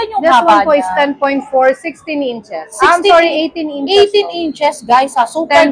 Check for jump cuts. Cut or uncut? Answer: uncut